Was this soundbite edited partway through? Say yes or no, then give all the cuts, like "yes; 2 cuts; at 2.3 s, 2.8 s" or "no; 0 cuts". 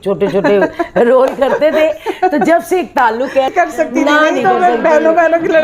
yes; 1 cut; at 3.5 s